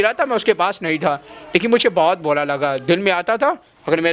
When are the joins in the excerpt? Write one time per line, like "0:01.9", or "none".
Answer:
none